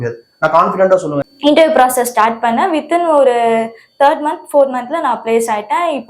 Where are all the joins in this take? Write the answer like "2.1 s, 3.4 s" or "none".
1.3 s